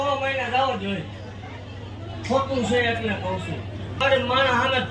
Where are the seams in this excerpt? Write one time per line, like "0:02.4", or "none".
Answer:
0:04.0